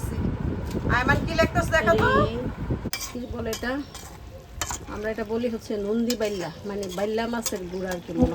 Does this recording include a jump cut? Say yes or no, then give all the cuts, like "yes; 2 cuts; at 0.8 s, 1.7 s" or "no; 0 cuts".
yes; 1 cut; at 2.9 s